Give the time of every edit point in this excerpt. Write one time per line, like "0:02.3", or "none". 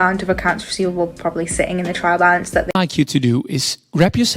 0:02.7